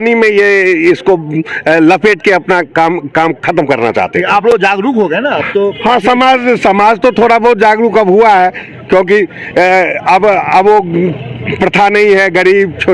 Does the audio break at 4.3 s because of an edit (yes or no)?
no